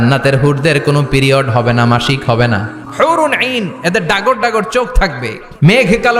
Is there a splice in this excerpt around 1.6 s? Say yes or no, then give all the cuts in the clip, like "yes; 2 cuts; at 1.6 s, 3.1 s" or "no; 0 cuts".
no; 2 cuts; at 2.8 s, 4.9 s